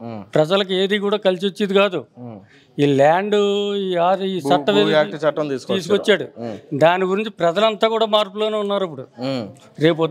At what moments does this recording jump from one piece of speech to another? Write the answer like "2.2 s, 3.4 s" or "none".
none